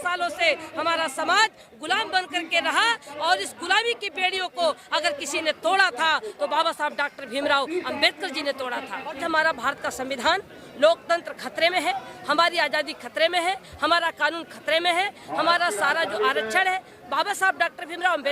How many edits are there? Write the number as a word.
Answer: one